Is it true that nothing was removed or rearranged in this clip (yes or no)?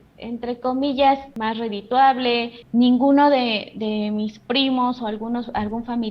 no